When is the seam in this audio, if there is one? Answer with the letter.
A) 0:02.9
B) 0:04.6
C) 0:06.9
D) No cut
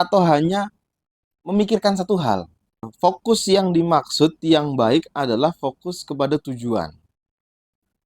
A